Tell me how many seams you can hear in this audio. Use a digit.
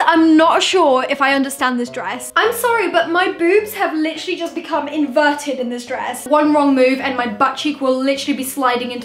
2